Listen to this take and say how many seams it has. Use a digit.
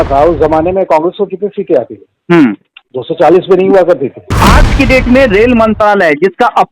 1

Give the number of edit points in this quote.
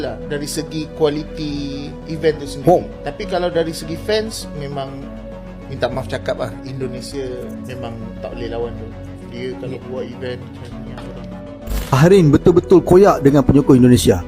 1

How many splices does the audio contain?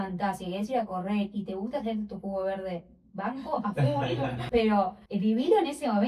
2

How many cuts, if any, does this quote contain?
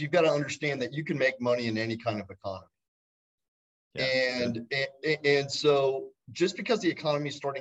0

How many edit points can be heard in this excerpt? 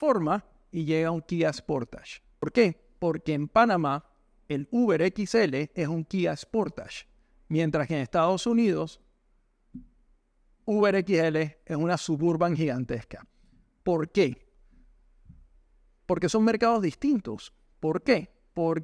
1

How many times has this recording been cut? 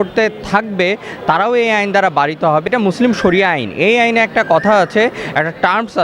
1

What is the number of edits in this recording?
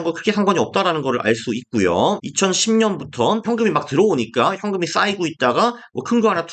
2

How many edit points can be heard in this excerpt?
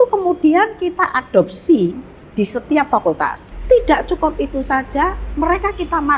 1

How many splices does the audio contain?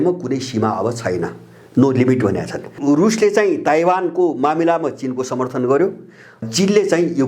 2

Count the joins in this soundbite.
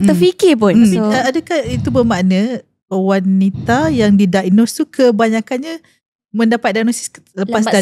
1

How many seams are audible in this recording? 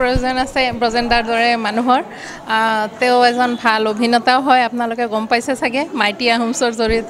0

